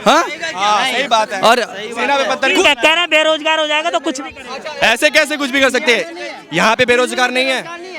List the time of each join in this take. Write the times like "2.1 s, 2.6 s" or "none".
none